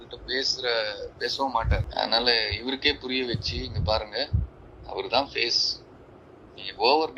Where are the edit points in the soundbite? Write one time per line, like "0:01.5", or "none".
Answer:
0:01.9